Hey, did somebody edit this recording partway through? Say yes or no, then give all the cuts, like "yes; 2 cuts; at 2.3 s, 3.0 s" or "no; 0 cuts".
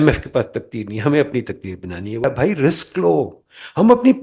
yes; 1 cut; at 2.2 s